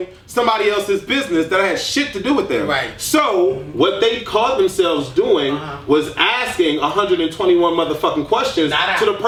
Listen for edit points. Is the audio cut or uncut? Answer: uncut